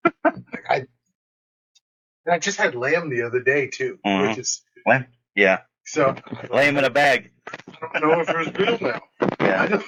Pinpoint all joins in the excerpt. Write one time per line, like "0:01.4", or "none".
none